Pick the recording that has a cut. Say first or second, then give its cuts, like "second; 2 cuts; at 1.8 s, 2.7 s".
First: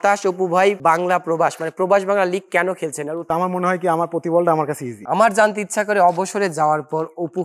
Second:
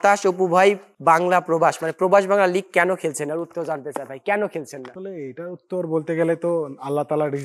first; 3 cuts; at 0.8 s, 3.3 s, 4.9 s